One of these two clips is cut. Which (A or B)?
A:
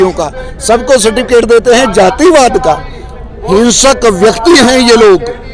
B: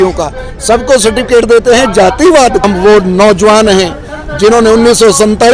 B